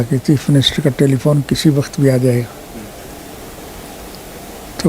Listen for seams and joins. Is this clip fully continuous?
yes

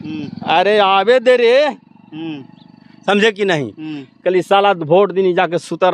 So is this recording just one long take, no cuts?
yes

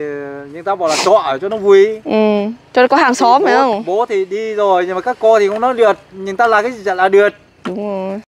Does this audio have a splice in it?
no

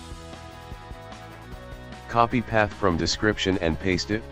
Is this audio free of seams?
yes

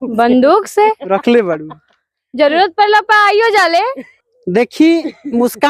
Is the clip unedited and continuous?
no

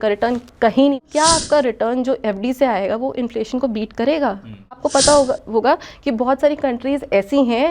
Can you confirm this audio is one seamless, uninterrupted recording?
no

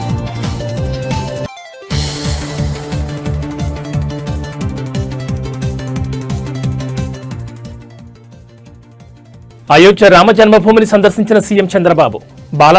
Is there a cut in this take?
yes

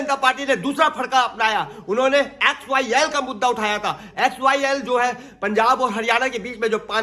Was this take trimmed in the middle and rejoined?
no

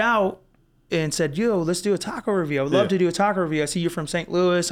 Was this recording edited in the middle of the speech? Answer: no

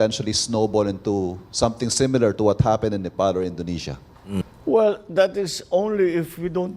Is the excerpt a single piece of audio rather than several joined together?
no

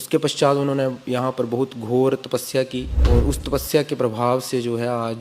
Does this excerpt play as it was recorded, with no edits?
no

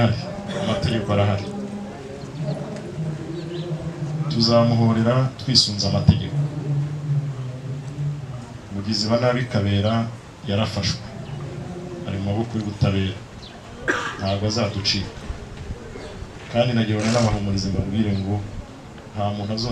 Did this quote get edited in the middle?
no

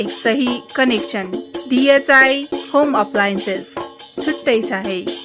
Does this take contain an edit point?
no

